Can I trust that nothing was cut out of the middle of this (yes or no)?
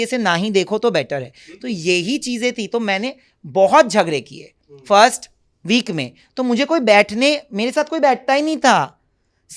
yes